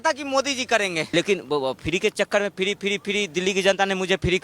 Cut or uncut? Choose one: cut